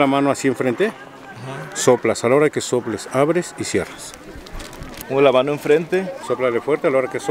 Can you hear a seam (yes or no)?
no